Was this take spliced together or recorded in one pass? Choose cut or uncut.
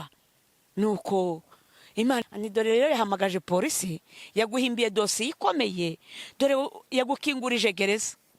cut